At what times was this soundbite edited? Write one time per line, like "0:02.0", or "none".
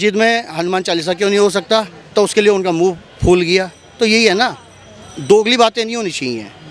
none